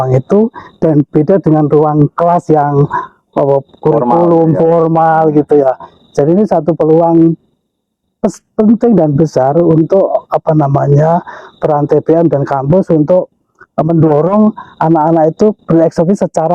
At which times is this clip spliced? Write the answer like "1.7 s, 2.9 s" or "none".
none